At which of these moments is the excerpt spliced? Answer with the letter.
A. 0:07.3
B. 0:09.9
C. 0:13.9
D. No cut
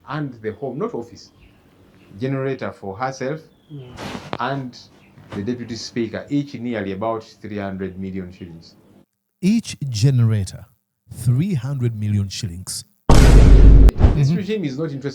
C